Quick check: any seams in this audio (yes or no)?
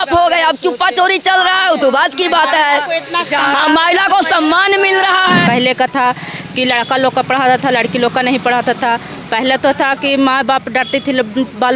yes